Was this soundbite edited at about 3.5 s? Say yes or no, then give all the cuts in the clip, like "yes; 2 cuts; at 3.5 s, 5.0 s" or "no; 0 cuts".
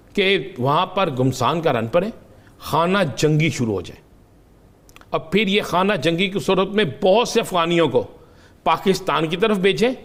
no; 0 cuts